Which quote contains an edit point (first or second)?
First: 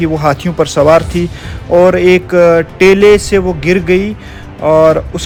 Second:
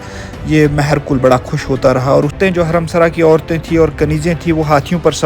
second